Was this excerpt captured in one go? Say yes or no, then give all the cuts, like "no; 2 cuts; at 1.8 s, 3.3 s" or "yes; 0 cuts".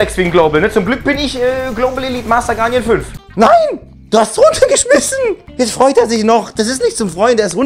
no; 1 cut; at 3.2 s